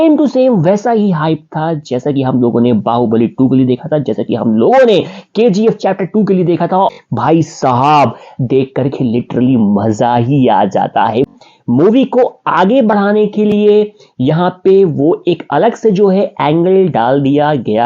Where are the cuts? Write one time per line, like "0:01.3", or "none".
0:06.9
0:11.3